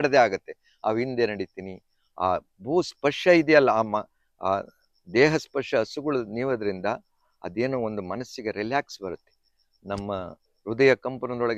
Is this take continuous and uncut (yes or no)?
yes